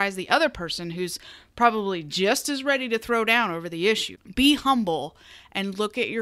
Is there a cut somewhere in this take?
yes; 1 cut; at 4.1 s

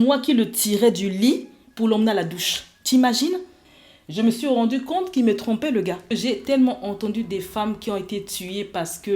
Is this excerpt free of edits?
no; 2 cuts; at 3.6 s, 6.1 s

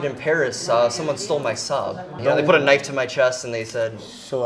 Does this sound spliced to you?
yes; 1 cut; at 2.1 s

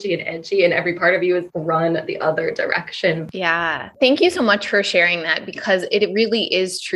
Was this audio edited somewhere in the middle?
yes; 1 cut; at 3.2 s

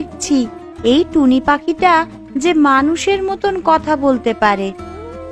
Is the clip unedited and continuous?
yes; 0 cuts

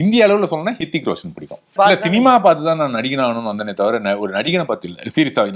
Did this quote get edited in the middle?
yes; 1 cut; at 1.7 s

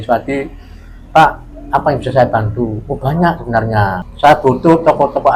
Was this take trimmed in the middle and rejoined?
yes; 1 cut; at 4.1 s

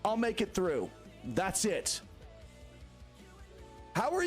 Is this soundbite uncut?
yes; 0 cuts

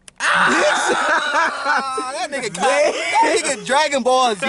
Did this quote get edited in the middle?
no; 0 cuts

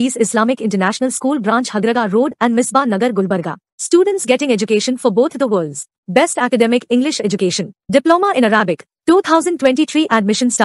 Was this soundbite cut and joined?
no; 0 cuts

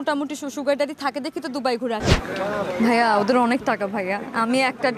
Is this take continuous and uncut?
no; 1 cut; at 2.0 s

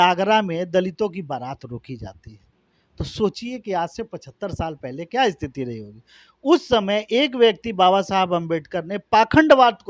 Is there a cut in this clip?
no; 0 cuts

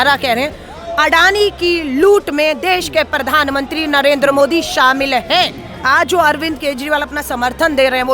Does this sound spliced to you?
yes; 1 cut; at 5.7 s

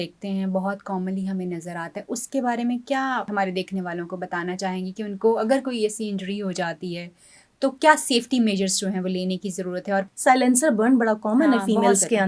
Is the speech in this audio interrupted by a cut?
yes; 2 cuts; at 3.3 s, 10.1 s

